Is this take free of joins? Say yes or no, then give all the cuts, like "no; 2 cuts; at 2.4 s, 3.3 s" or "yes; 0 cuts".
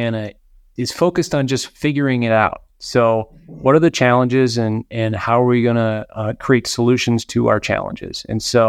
yes; 0 cuts